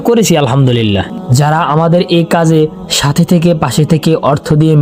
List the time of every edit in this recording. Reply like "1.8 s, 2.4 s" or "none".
1.1 s